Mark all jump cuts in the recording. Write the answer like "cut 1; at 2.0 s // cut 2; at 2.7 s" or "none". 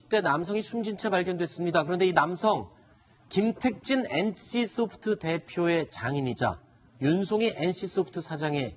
cut 1; at 1.3 s